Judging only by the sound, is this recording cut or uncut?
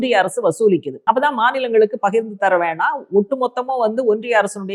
cut